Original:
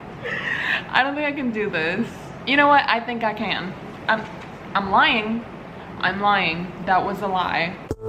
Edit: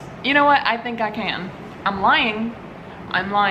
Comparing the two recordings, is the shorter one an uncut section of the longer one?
no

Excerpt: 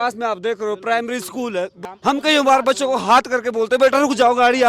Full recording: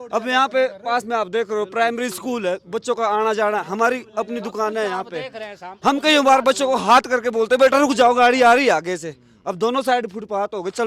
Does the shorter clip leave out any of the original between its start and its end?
yes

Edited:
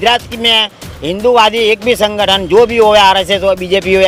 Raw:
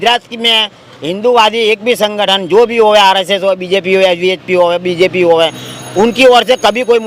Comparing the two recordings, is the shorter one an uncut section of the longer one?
yes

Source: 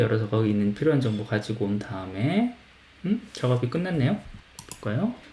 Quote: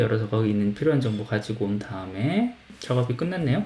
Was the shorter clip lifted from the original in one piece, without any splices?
no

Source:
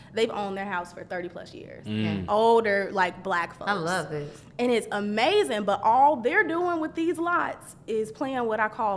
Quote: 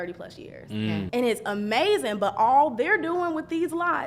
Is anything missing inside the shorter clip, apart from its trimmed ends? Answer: yes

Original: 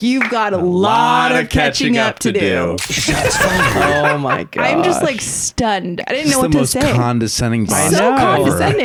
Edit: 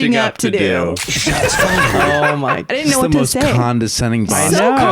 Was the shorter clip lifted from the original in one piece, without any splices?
no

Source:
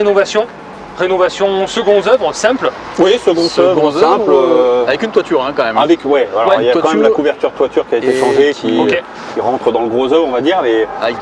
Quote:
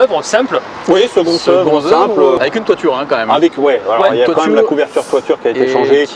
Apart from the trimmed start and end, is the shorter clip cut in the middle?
yes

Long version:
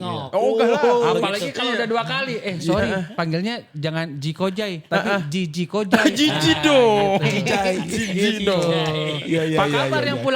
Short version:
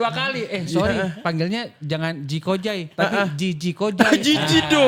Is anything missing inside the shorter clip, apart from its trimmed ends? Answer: no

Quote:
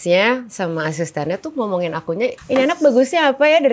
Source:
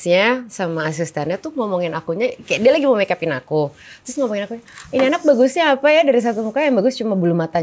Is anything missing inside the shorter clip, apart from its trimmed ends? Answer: yes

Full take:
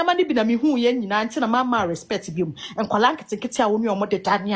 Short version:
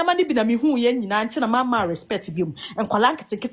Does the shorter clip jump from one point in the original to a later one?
no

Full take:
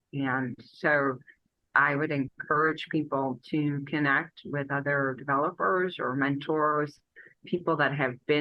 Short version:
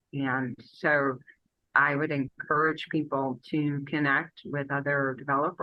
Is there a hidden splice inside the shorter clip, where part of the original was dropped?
no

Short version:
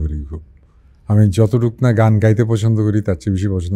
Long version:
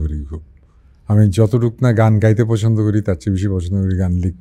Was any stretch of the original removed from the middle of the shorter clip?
no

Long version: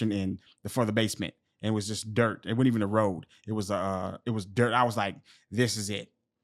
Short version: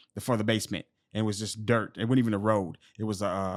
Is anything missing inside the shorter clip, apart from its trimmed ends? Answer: no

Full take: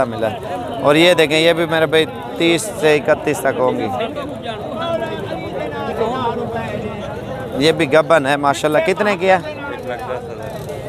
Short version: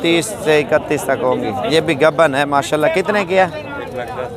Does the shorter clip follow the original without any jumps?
no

